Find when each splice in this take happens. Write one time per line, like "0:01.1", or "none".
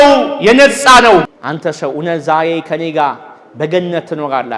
0:01.3